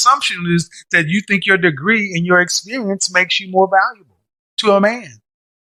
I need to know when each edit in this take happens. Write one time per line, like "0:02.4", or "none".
none